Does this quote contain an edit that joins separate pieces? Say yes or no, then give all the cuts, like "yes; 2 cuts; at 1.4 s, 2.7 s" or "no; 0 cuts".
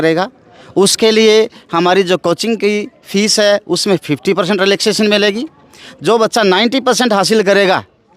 no; 0 cuts